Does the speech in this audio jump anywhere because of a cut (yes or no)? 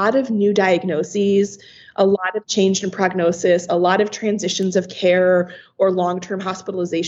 no